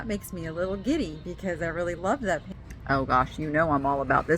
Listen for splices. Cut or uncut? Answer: cut